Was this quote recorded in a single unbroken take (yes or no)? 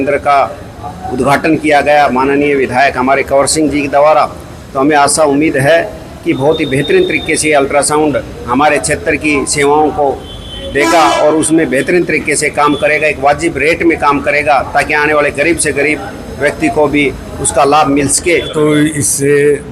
no